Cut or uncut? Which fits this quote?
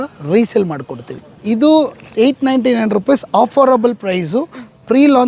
cut